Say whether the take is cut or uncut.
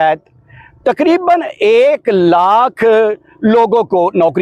uncut